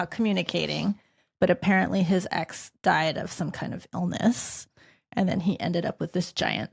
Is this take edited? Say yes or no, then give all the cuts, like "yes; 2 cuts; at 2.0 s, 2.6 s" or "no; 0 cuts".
no; 0 cuts